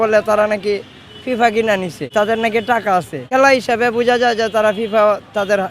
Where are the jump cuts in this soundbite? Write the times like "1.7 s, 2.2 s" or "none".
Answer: 2.0 s, 3.3 s